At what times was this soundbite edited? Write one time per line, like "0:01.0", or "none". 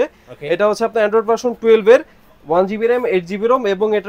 none